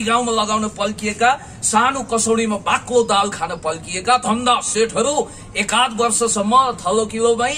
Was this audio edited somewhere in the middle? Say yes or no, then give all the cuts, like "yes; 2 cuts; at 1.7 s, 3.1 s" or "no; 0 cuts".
no; 0 cuts